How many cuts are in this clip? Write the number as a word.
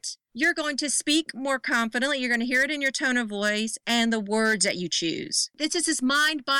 one